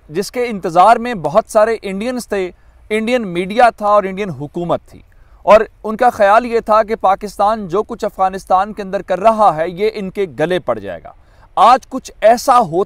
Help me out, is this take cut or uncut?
uncut